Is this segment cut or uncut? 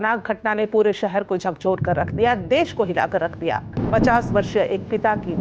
cut